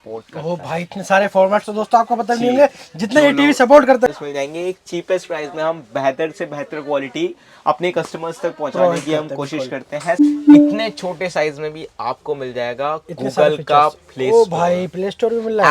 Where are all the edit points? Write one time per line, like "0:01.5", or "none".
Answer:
0:04.1
0:10.2

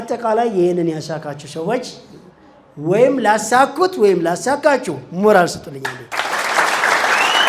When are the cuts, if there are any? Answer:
0:06.5

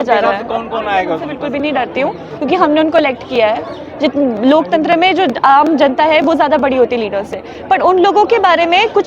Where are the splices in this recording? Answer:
0:01.4

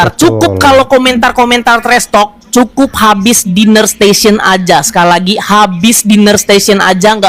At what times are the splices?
none

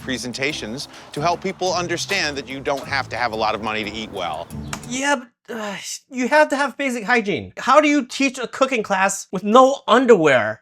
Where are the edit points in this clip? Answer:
0:07.5
0:09.3

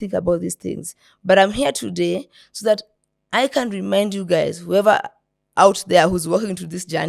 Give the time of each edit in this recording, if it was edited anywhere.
none

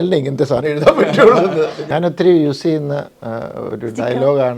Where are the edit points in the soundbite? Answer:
0:01.8

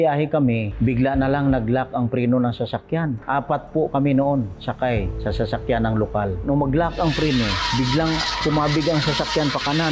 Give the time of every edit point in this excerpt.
0:03.2

